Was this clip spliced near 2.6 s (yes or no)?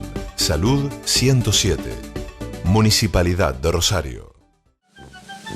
no